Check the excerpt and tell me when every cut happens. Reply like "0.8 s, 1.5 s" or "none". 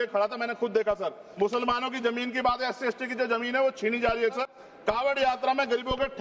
1.2 s, 4.4 s